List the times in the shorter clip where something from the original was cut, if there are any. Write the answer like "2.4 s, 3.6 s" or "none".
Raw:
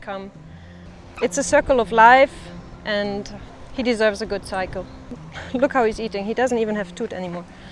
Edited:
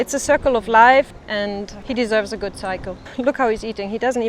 1.5 s, 3.0 s